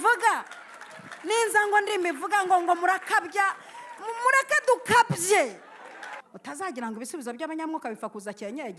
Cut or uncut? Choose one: cut